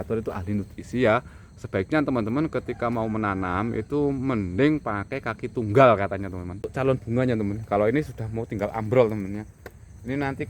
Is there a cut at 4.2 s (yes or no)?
no